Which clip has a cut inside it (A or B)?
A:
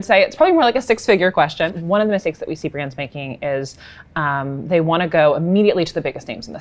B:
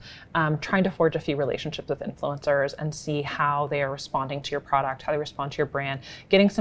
A